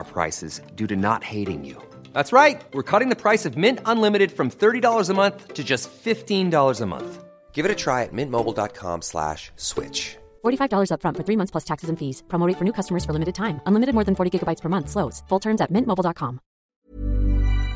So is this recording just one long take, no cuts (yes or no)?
no